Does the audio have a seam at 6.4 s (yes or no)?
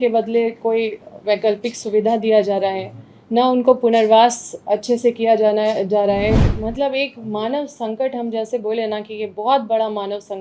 yes